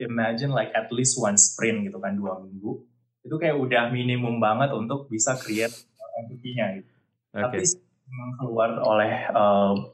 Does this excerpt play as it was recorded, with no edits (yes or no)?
yes